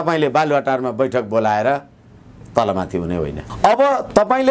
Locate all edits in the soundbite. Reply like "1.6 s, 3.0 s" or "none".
3.4 s